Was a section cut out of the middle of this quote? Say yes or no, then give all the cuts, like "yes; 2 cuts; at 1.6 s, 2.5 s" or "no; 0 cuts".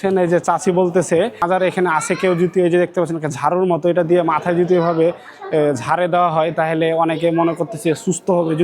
yes; 1 cut; at 1.4 s